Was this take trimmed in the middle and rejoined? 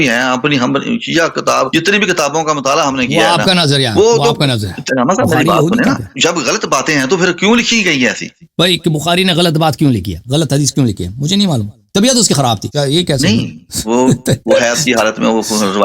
yes; 5 cuts; at 1.7 s, 4.8 s, 6.1 s, 8.5 s, 10.2 s

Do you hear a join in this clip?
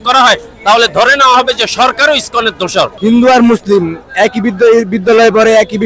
yes; 1 cut; at 2.9 s

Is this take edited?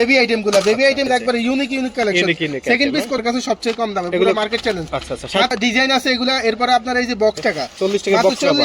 yes; 4 cuts; at 1.1 s, 3.2 s, 5.5 s, 7.4 s

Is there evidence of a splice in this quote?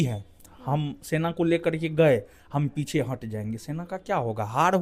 no; 0 cuts

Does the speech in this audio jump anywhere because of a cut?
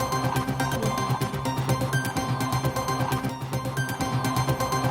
no; 0 cuts

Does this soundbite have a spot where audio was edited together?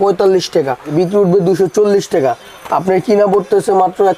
yes; 1 cut; at 0.9 s

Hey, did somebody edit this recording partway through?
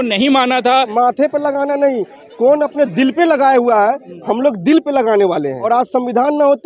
yes; 2 cuts; at 0.9 s, 5.6 s

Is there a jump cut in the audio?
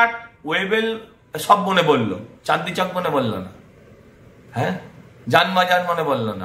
no; 0 cuts

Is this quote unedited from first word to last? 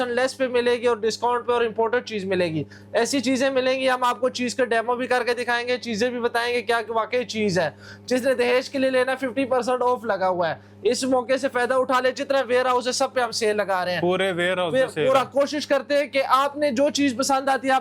yes; 0 cuts

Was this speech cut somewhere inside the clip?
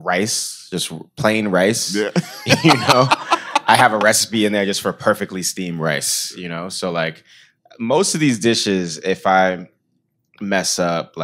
no; 0 cuts

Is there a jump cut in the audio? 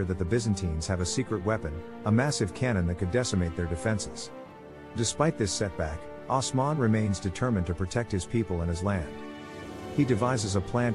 yes; 1 cut; at 4.8 s

